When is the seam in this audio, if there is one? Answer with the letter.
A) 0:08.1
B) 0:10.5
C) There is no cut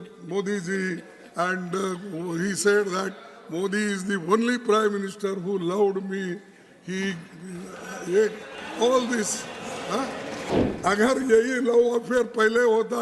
B